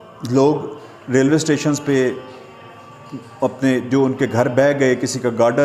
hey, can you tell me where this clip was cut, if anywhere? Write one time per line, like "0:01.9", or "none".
none